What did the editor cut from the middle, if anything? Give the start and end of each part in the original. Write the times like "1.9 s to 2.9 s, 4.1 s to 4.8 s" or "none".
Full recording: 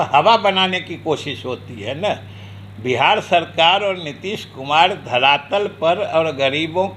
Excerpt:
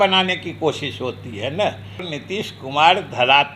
2.6 s to 4.1 s